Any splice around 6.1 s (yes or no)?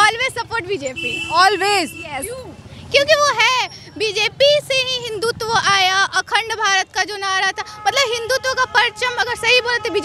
no